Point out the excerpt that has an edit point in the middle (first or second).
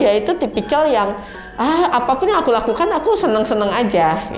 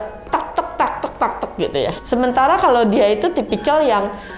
second